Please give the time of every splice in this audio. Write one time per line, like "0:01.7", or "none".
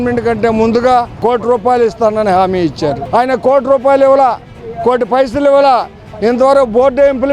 0:01.2
0:03.0